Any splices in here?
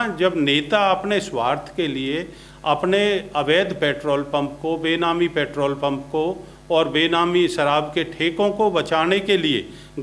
no; 0 cuts

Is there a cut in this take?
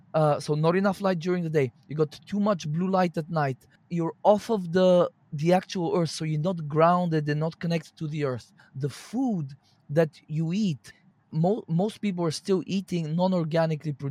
yes; 3 cuts; at 3.8 s, 8.6 s, 11.3 s

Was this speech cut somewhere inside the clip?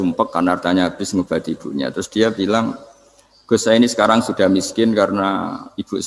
no; 0 cuts

